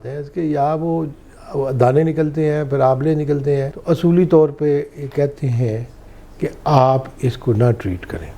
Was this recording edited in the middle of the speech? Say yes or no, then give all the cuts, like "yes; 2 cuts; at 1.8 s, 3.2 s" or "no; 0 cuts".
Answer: yes; 1 cut; at 3.7 s